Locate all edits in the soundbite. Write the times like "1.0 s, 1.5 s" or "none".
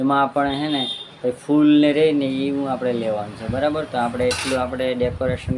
none